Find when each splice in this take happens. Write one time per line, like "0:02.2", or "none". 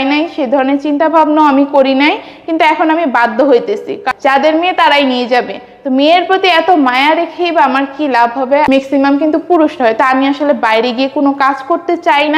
0:04.0
0:08.7